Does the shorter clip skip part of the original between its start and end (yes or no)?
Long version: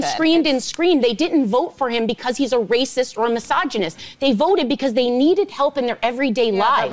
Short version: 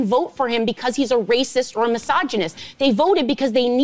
no